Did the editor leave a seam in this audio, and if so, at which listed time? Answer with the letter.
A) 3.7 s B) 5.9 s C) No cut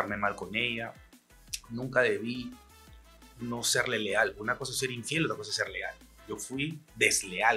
B